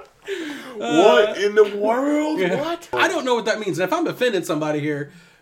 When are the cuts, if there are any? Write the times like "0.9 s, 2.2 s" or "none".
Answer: 2.9 s